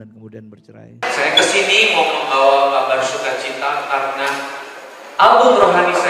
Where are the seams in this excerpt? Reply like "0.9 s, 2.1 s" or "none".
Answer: 1.0 s